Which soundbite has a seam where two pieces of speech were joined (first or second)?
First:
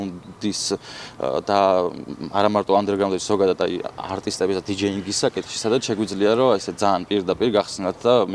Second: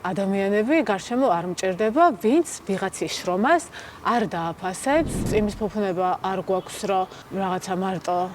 second